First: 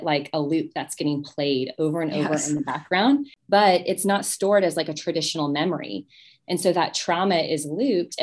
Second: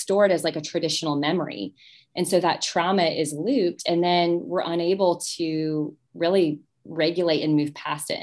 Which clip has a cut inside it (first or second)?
first